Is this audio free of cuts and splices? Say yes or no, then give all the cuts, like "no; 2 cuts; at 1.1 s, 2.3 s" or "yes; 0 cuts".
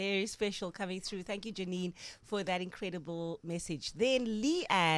yes; 0 cuts